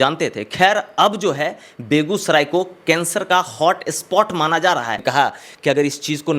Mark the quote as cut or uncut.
cut